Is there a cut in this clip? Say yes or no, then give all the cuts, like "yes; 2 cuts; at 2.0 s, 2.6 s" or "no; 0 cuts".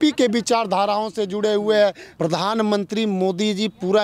yes; 1 cut; at 2.1 s